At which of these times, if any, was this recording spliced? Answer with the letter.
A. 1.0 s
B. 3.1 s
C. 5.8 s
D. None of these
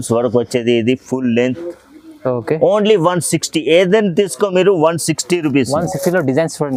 D